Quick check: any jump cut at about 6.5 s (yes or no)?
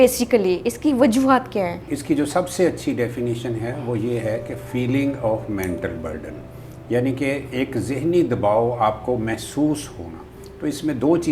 no